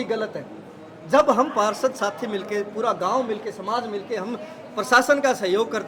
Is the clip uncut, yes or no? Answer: yes